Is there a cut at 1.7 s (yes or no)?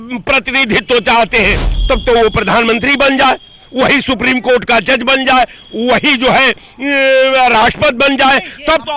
yes